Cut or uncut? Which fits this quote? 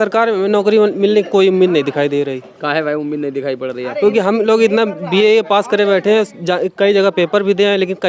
uncut